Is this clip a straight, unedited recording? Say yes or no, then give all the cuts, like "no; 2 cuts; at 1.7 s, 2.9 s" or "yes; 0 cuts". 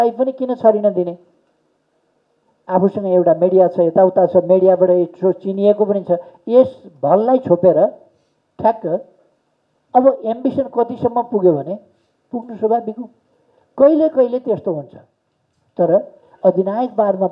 yes; 0 cuts